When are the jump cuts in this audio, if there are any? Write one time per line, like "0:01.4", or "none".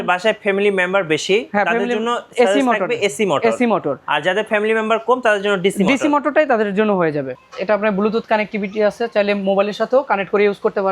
0:07.4